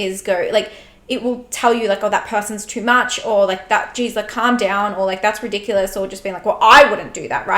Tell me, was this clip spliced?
no; 0 cuts

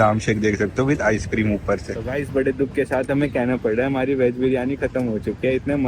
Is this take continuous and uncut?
no; 1 cut; at 1.9 s

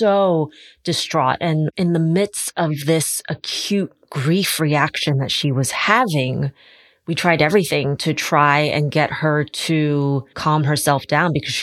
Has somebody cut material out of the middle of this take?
yes; 2 cuts; at 1.7 s, 10.4 s

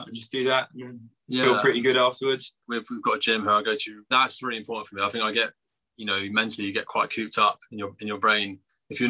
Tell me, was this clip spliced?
yes; 2 cuts; at 2.6 s, 4.1 s

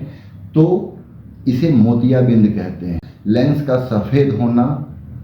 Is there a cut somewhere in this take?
yes; 1 cut; at 3.1 s

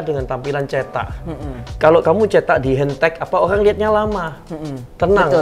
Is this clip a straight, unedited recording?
yes; 0 cuts

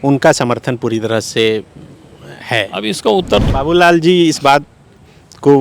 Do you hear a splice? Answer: yes; 1 cut; at 3.4 s

